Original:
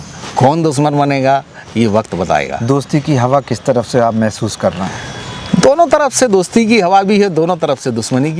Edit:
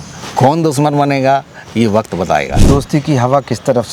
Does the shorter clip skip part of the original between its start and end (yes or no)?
no